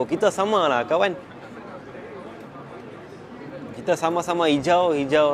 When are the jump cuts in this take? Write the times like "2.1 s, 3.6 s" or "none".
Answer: none